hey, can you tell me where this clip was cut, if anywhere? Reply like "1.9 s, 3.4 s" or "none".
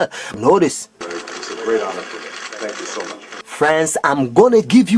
3.1 s